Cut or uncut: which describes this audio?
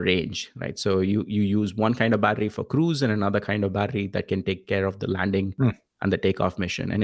uncut